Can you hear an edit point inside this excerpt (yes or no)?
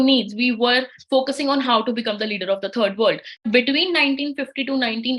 yes